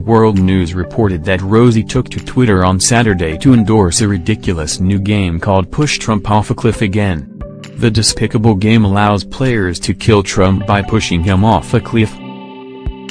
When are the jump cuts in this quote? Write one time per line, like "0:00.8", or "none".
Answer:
0:12.2